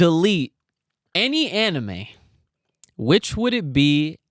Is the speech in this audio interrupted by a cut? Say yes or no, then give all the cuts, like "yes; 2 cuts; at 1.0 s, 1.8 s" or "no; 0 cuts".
no; 0 cuts